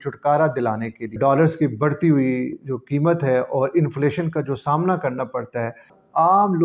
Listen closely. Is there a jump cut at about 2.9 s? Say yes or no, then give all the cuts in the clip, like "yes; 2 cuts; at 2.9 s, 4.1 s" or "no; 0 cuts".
no; 2 cuts; at 1.0 s, 5.8 s